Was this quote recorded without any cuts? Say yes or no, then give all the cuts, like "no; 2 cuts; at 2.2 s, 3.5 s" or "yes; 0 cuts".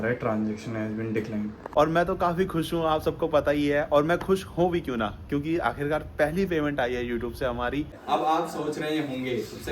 no; 2 cuts; at 1.7 s, 8.0 s